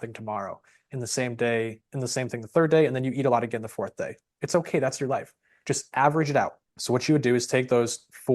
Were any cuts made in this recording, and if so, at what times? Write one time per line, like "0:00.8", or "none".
0:06.7